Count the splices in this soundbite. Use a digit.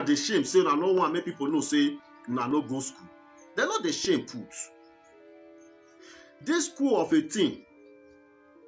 2